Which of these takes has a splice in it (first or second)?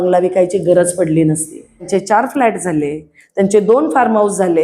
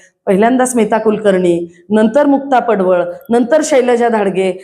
first